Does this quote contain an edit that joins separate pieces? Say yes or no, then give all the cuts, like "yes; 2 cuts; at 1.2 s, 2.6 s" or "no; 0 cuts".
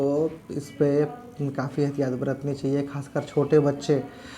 yes; 1 cut; at 0.9 s